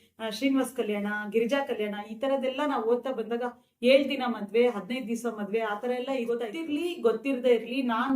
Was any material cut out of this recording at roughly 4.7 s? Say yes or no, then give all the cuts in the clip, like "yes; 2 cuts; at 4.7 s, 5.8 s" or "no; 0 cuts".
no; 1 cut; at 6.5 s